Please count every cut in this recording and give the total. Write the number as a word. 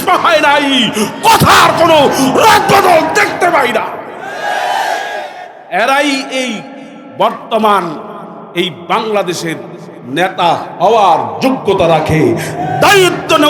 zero